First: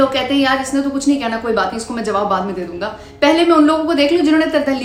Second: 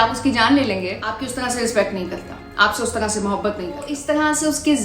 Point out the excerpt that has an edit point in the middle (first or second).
second